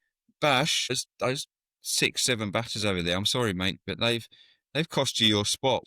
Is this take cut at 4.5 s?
no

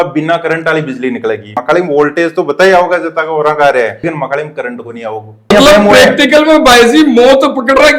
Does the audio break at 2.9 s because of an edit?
no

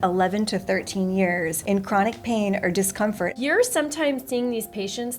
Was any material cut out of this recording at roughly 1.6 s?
yes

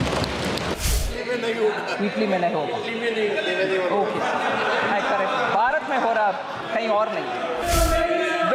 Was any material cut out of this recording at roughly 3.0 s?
no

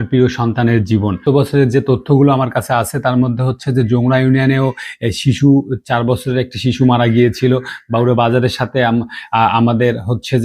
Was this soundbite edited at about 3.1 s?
no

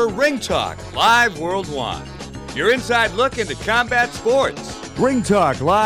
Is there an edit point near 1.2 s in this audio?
no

